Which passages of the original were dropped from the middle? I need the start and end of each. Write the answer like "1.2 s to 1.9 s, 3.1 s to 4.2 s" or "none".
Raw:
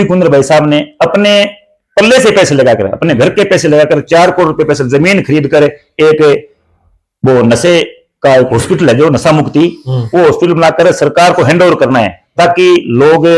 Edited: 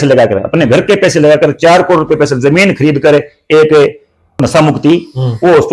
6.9 s to 9.1 s